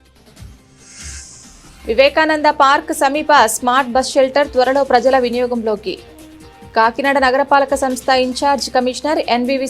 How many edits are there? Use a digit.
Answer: 1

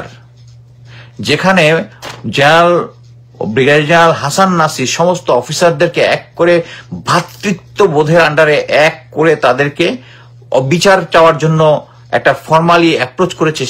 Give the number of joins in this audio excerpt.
0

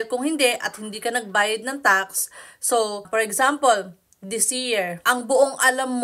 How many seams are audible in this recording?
2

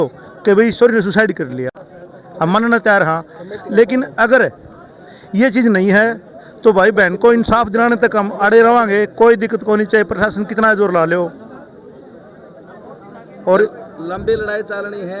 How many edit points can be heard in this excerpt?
0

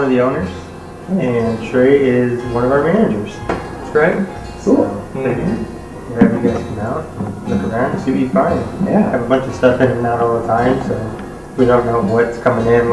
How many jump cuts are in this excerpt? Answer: 0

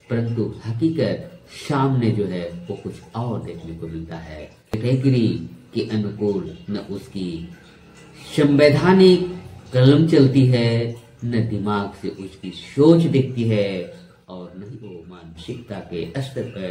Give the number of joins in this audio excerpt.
1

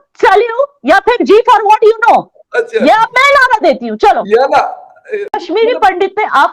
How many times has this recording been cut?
1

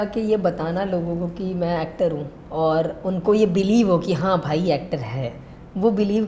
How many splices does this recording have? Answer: 1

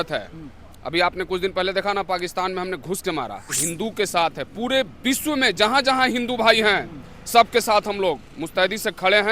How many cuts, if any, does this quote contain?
1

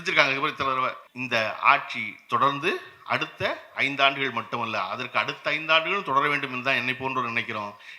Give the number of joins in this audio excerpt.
1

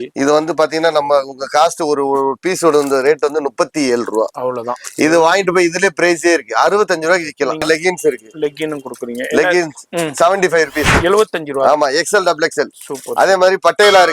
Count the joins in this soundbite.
1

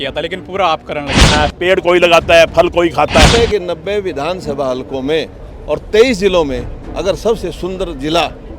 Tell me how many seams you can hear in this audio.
2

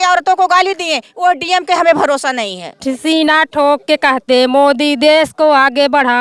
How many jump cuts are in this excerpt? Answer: 1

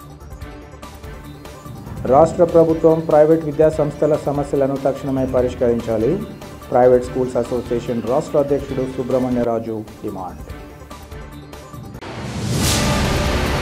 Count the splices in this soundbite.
0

